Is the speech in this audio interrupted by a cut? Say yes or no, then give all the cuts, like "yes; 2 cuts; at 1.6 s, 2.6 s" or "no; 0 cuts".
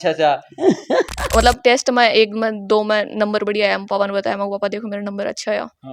yes; 1 cut; at 1.3 s